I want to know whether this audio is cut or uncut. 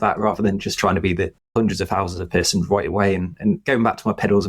cut